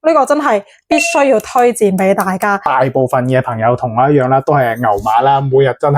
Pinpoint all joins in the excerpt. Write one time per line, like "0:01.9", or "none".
0:02.6